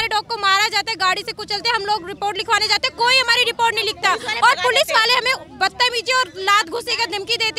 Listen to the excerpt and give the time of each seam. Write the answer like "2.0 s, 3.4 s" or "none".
none